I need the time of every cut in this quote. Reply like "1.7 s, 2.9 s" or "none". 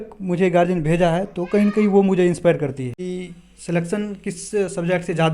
3.0 s